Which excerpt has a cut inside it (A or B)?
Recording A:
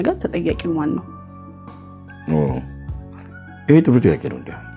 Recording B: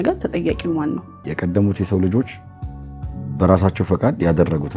B